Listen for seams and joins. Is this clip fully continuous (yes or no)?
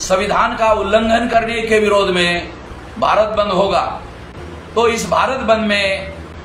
yes